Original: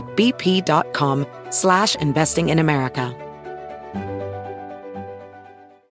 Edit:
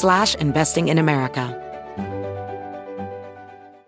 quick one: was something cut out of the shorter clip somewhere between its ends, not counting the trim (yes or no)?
yes